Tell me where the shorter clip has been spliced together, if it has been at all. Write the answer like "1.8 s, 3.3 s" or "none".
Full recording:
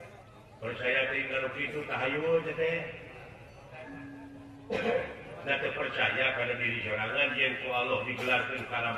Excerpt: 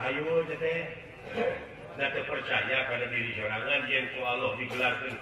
1.3 s